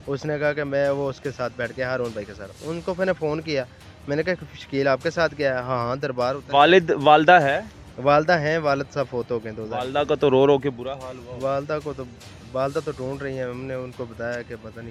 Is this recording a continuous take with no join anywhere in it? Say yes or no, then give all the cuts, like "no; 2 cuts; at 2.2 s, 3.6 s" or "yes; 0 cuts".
yes; 0 cuts